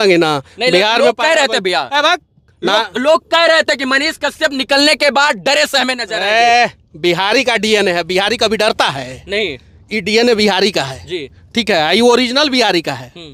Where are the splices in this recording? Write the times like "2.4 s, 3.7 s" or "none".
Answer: none